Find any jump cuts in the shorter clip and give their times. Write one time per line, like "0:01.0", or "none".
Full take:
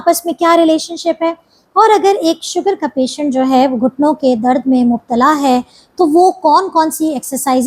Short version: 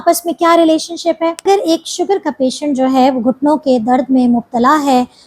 0:01.4